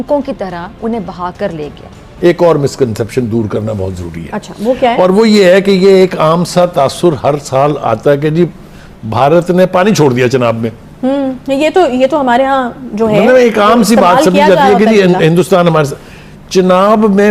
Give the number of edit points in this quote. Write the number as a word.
one